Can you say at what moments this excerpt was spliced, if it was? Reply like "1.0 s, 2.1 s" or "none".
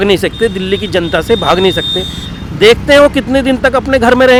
none